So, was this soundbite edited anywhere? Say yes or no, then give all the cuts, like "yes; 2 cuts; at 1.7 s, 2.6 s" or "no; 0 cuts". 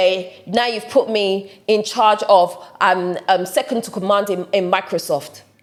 no; 0 cuts